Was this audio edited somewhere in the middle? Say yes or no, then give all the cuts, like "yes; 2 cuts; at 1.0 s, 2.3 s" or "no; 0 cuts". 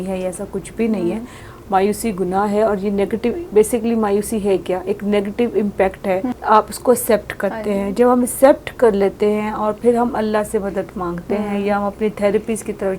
yes; 2 cuts; at 1.4 s, 6.3 s